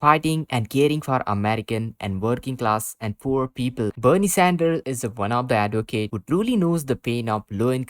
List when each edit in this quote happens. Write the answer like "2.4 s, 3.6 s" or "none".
3.9 s